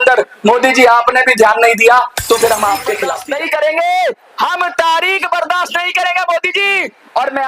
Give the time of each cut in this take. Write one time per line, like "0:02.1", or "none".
0:02.9